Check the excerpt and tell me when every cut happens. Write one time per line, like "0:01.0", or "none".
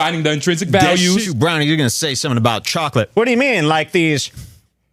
0:01.3